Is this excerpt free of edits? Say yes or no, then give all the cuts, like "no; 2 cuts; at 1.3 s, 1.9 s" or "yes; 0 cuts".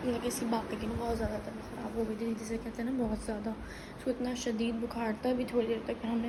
yes; 0 cuts